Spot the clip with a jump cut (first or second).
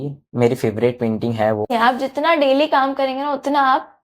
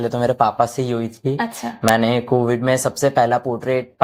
first